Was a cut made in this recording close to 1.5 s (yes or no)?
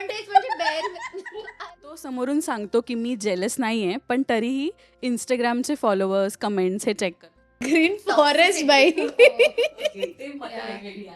yes